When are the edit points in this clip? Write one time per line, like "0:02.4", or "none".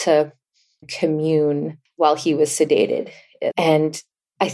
0:00.9
0:01.8
0:03.5